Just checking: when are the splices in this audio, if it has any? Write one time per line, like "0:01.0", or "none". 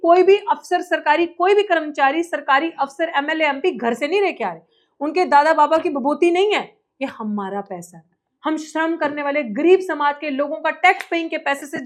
none